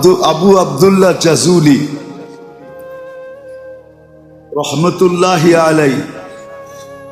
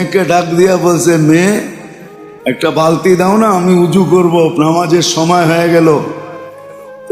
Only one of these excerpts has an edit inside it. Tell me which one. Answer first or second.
first